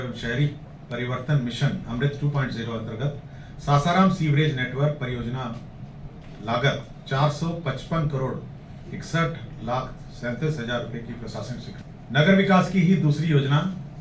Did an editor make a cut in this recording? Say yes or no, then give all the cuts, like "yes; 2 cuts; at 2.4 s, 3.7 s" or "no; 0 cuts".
yes; 1 cut; at 11.8 s